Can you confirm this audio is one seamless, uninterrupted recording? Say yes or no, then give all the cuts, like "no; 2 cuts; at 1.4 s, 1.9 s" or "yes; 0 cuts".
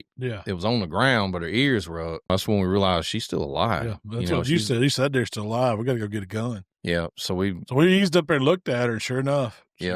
no; 1 cut; at 2.3 s